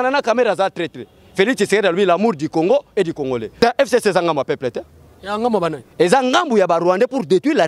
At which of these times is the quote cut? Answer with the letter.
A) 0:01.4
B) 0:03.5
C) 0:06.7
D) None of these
B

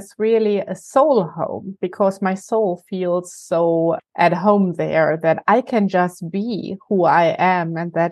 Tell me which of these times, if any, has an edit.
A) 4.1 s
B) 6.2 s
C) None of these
A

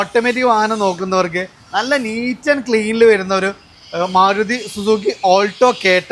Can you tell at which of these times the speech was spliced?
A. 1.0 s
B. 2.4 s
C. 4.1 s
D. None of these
D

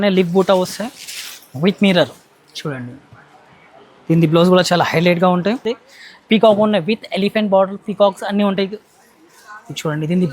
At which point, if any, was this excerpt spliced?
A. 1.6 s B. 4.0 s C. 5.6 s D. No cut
C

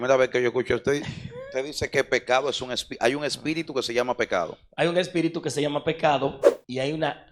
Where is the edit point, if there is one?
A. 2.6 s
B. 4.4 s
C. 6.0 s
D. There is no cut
D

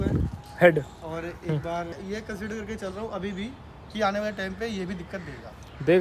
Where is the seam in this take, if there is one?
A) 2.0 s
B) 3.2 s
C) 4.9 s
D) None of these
A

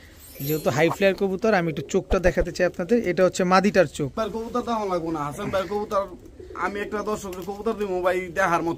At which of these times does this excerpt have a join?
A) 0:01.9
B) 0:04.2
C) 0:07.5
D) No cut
B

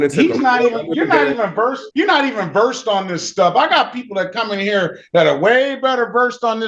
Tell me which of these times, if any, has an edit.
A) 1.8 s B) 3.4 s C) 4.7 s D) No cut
A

